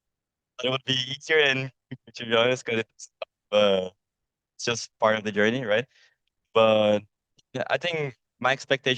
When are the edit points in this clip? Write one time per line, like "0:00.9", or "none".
none